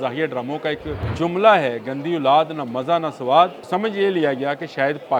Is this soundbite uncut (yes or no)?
no